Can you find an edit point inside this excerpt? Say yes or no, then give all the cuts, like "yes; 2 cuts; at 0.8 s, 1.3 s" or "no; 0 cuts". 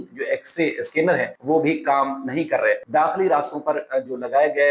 yes; 2 cuts; at 1.3 s, 2.8 s